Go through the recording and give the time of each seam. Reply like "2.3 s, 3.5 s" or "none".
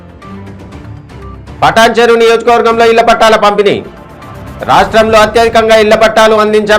none